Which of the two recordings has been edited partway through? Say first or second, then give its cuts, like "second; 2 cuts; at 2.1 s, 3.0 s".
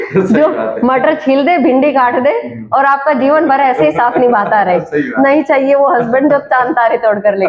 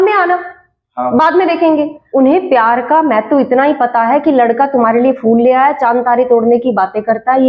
second; 1 cut; at 2.0 s